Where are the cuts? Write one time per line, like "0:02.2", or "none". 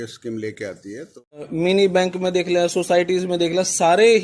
0:01.5